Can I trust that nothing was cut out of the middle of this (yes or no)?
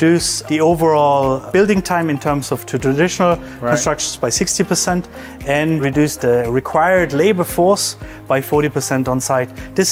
yes